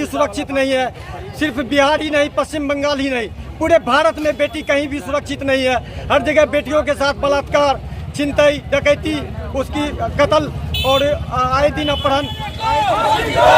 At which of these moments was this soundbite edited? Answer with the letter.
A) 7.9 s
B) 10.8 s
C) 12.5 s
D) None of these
C